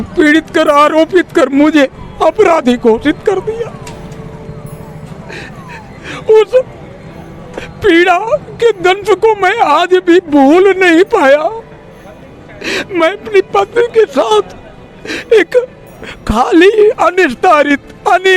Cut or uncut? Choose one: uncut